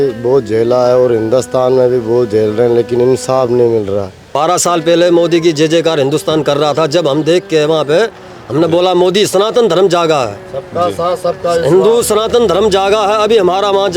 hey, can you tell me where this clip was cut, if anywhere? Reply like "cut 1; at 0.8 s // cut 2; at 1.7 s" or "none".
cut 1; at 4.2 s